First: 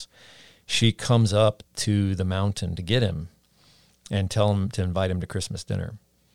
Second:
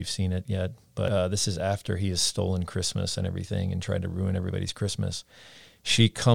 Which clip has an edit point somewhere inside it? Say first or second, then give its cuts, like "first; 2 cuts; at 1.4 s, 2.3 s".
second; 1 cut; at 1.1 s